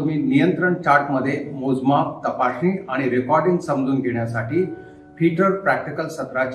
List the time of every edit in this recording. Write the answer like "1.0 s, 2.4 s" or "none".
none